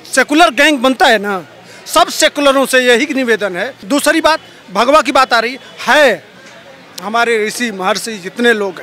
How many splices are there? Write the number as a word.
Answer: one